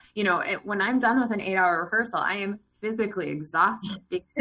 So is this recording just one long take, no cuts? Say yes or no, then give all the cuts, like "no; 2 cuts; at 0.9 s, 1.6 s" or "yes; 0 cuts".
yes; 0 cuts